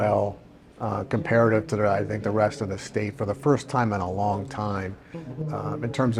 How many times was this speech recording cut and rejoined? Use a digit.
0